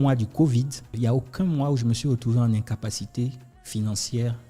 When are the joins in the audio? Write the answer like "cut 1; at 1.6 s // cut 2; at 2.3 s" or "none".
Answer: cut 1; at 0.9 s